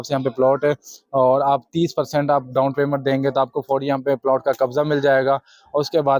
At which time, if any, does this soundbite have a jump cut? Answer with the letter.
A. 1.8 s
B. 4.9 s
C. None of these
C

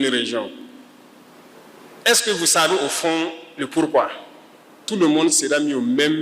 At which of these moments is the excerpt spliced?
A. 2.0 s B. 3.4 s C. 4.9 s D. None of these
C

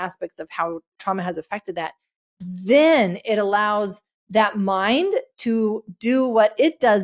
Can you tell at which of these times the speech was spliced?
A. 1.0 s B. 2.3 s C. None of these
A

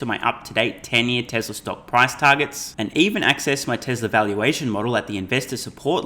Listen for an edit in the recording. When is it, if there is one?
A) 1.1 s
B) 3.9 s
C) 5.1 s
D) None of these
D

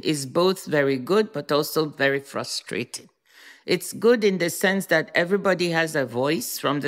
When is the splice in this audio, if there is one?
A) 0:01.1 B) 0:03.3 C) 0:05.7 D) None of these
D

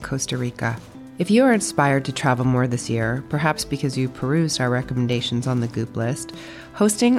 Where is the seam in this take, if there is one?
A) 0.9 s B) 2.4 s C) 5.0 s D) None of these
D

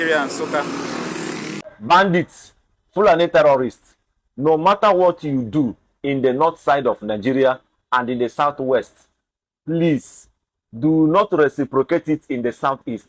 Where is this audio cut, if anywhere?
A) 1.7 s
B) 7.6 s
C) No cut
A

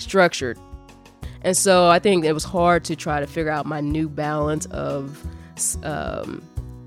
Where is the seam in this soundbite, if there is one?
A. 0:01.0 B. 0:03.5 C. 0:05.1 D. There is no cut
A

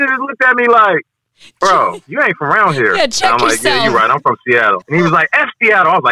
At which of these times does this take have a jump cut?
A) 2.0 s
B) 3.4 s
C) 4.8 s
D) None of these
C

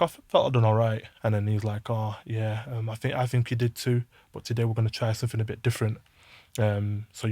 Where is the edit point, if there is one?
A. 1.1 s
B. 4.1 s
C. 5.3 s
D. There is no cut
A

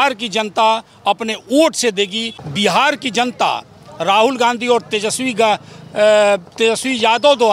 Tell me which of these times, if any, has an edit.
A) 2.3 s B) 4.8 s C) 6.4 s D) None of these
A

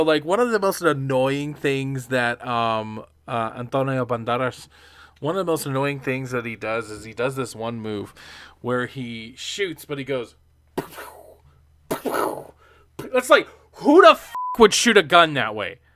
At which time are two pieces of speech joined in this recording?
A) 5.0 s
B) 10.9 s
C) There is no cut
C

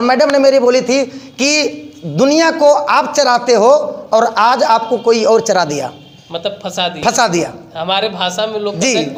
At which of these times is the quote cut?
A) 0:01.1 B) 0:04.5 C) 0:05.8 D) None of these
D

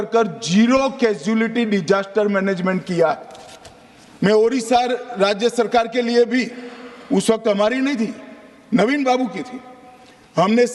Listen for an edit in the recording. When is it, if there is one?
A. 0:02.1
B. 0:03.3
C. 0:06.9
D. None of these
D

